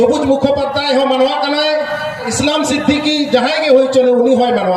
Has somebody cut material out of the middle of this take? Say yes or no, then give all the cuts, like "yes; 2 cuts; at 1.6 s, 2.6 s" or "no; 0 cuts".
yes; 1 cut; at 2.3 s